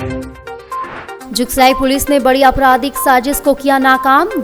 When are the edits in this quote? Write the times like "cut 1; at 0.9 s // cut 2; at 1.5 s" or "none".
none